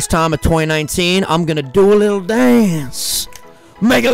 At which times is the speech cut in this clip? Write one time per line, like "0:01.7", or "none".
none